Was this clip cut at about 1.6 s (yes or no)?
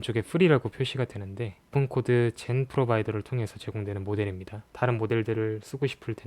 yes